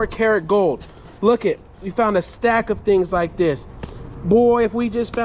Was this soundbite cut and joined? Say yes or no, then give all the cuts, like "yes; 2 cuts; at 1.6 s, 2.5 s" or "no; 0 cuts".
no; 0 cuts